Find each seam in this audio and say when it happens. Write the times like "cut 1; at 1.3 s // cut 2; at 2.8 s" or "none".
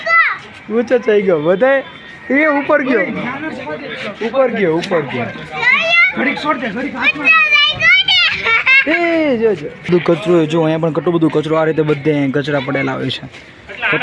cut 1; at 9.9 s